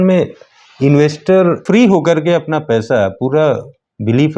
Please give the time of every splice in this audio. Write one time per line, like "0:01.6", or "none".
0:01.6